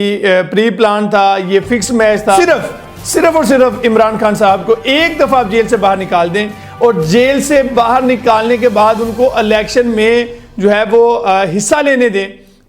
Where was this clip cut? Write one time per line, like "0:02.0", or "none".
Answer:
0:02.4